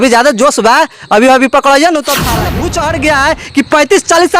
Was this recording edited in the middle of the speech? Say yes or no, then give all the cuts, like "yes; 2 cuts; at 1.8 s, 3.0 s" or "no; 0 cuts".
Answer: yes; 1 cut; at 2.3 s